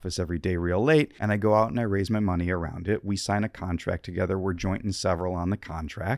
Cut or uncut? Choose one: cut